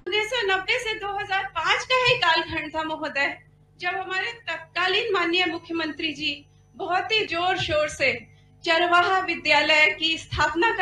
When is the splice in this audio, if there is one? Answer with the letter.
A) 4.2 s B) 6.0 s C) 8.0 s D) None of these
D